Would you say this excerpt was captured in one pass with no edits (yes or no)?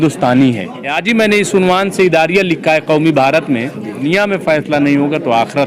no